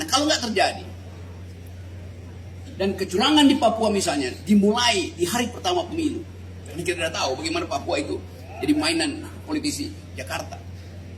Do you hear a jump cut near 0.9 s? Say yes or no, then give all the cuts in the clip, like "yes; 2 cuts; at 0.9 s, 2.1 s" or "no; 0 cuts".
no; 0 cuts